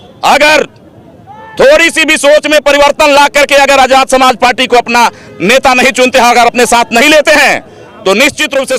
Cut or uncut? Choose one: uncut